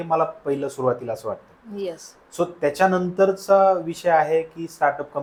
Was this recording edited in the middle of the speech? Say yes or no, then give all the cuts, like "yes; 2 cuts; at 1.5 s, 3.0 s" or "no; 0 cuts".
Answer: no; 0 cuts